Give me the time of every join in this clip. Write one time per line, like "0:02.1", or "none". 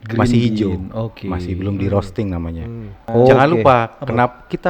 0:03.1